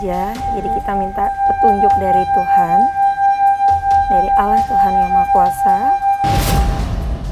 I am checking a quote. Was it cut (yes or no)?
yes